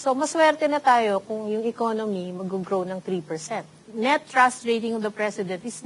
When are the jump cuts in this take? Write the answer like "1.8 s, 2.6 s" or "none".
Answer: 3.8 s